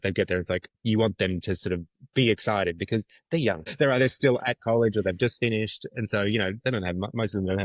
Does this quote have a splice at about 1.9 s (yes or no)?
no